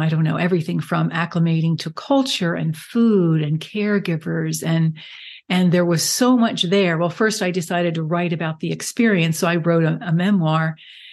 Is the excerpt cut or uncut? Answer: uncut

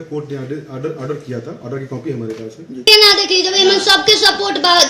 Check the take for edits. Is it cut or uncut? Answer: cut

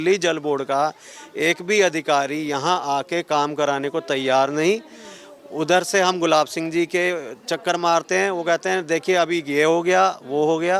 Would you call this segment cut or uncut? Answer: uncut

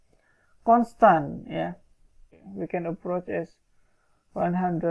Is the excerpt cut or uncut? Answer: cut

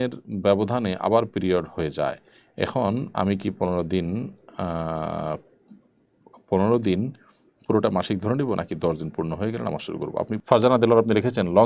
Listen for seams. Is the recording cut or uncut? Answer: cut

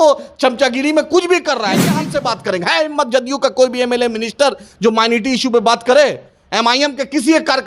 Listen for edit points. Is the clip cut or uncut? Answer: cut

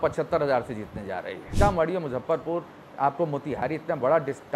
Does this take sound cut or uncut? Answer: cut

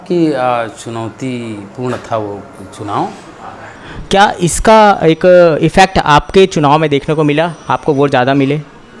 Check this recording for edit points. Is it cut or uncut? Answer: cut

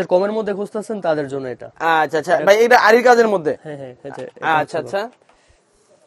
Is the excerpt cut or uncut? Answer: uncut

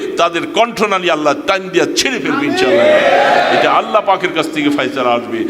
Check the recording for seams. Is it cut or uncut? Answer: uncut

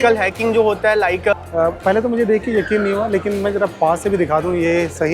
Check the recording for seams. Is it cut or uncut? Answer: cut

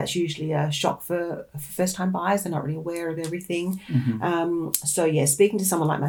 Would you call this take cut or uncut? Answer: uncut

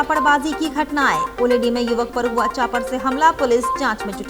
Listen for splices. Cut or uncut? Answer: uncut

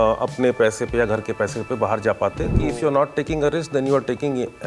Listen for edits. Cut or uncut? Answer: cut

